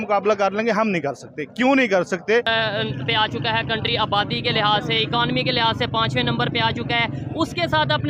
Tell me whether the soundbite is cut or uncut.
cut